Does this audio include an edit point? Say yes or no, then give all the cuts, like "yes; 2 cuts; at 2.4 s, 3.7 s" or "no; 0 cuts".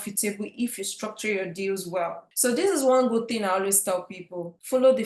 yes; 1 cut; at 2.2 s